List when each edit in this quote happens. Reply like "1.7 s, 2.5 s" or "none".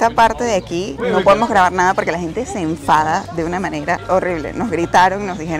none